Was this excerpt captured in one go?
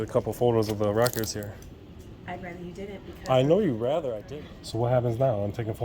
no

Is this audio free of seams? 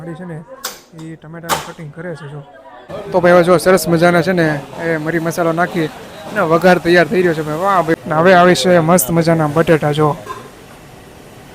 no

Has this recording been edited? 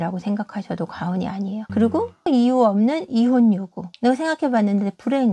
no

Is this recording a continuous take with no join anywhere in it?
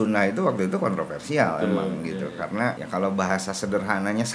no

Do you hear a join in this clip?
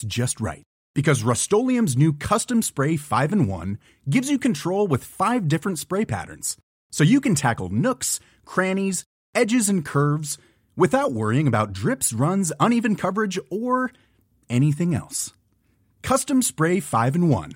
no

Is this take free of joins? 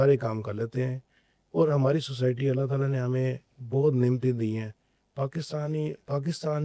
yes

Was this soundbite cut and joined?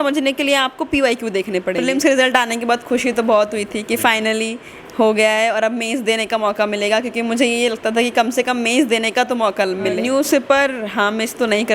yes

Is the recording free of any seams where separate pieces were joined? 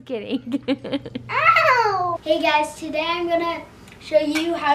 no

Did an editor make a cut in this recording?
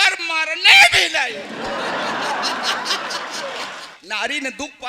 yes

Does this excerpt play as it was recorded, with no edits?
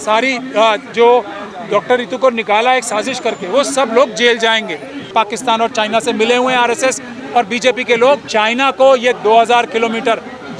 no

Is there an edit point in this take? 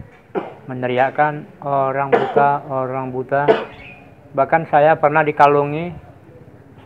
no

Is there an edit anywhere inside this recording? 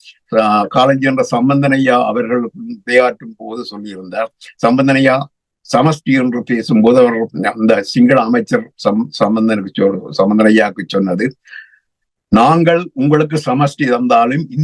no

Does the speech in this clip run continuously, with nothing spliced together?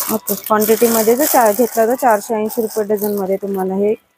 yes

